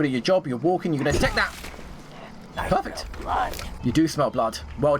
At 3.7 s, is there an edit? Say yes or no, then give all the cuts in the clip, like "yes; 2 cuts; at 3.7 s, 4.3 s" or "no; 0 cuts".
yes; 1 cut; at 3.7 s